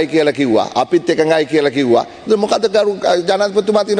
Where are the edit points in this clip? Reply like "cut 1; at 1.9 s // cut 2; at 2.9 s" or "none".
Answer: none